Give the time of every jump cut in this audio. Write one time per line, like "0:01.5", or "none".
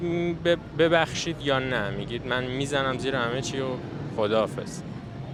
none